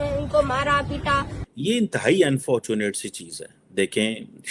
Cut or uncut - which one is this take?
cut